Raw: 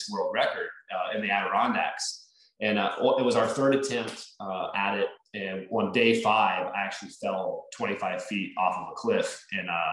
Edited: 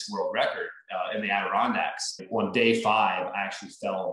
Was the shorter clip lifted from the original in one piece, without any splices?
no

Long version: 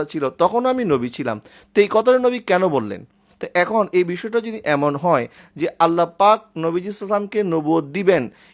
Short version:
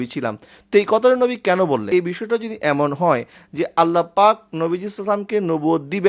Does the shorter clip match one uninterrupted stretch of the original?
no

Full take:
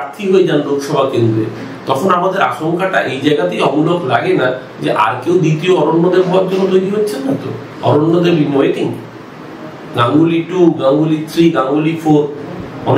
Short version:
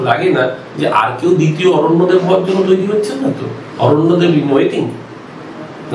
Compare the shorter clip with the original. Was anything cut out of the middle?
no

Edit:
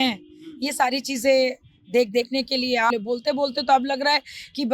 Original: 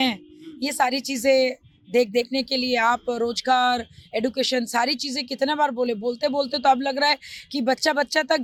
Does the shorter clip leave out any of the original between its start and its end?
yes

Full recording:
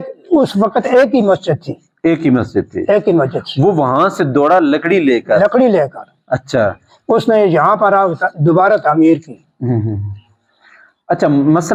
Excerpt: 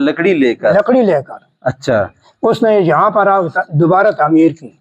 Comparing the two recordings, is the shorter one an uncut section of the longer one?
yes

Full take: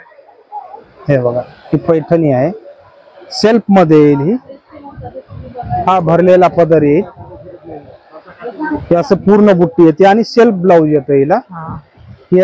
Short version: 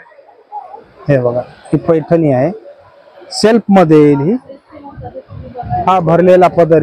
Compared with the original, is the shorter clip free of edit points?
yes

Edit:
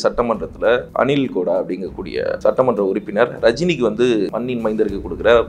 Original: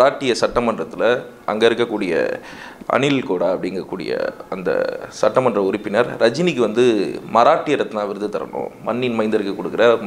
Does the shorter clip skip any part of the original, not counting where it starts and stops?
yes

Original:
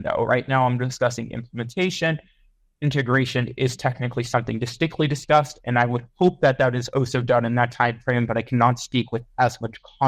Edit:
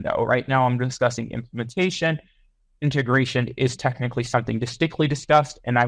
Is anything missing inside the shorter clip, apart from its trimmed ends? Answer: no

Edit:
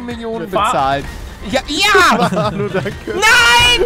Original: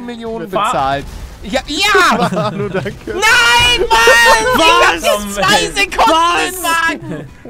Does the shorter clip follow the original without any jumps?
yes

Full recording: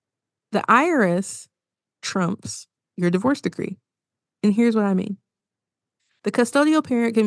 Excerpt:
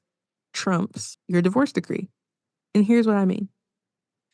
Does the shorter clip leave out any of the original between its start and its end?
yes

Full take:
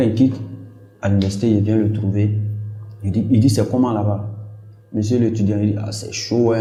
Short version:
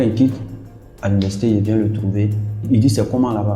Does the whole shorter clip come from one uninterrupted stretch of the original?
no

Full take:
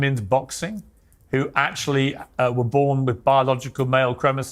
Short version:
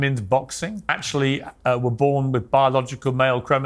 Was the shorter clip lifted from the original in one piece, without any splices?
no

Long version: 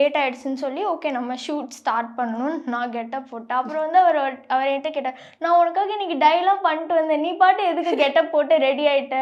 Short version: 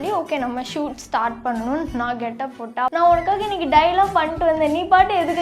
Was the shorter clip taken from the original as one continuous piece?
no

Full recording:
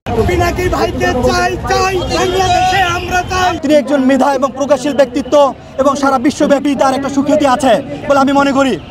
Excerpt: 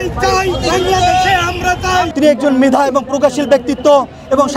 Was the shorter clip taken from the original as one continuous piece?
yes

